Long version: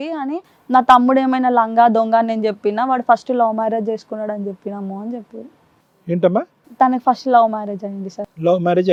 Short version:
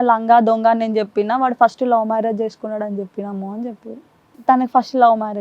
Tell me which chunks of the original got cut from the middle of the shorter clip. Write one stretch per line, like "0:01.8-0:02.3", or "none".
0:05.8-0:06.6